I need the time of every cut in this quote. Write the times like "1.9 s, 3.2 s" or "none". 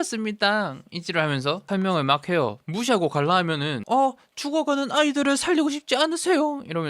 1.6 s